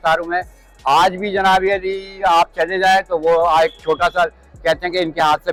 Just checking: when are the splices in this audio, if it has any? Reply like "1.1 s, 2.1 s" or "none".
none